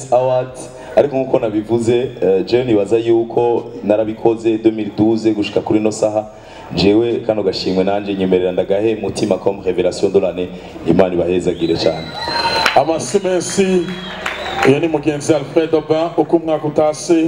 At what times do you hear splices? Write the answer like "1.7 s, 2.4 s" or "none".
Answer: none